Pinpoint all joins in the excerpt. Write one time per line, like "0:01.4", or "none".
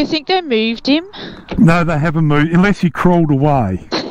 none